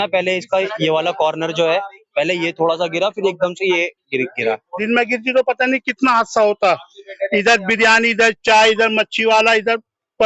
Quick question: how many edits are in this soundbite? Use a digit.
1